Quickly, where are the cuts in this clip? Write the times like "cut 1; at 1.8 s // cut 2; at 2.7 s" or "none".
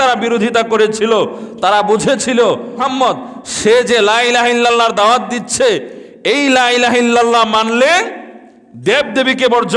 cut 1; at 2.8 s